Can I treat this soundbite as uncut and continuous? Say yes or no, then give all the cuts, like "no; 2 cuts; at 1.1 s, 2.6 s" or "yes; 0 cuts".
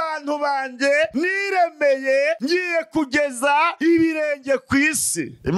yes; 0 cuts